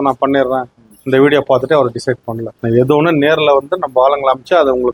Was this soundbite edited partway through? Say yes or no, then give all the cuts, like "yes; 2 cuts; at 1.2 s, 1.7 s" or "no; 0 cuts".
no; 0 cuts